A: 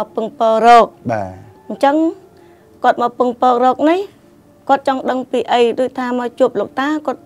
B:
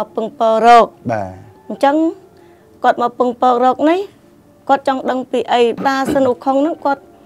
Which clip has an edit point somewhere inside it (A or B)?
B